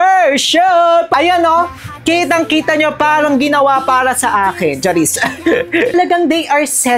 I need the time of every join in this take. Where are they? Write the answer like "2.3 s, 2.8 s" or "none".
1.1 s, 5.9 s